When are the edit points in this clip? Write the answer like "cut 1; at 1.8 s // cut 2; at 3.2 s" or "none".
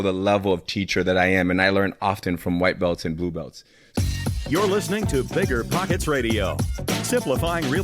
cut 1; at 3.8 s